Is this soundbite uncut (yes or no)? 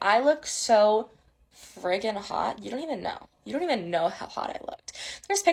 yes